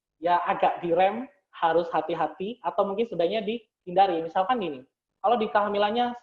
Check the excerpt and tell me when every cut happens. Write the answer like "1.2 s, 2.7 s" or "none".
none